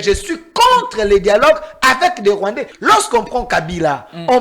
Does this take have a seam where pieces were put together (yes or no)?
yes